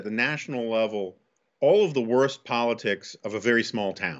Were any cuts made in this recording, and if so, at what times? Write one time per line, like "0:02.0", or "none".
none